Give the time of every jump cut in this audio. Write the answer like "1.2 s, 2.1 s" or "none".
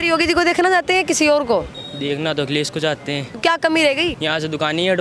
1.8 s, 3.3 s, 4.2 s